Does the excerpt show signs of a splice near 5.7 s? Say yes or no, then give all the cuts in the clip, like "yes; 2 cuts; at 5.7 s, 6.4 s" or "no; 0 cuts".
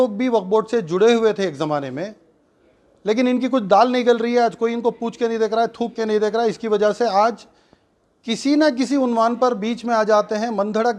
no; 0 cuts